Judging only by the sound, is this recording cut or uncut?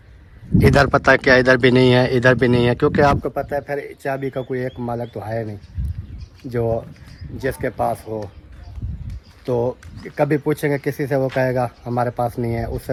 uncut